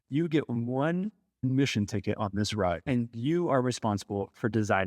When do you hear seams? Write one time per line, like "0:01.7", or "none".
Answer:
0:01.4
0:02.8